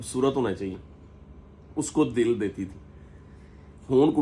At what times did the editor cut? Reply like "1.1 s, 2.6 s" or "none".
none